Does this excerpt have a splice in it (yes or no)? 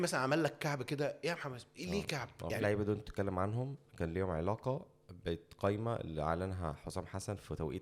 yes